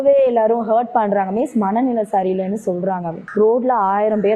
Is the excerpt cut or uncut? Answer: cut